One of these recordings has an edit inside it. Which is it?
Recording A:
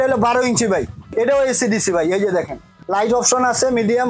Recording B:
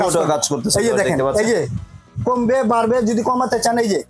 A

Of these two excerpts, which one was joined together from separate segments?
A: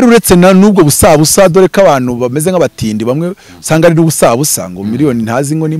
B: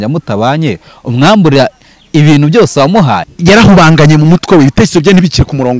B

